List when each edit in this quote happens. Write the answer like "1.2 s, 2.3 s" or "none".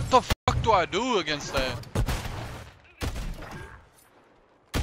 1.8 s